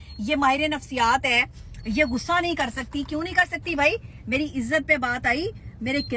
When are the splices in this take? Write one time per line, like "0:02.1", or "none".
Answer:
none